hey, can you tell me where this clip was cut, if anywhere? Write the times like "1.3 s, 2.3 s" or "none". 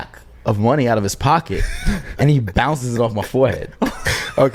none